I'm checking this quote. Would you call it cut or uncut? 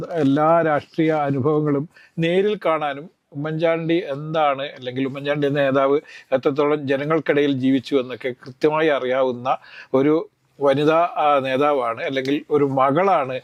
uncut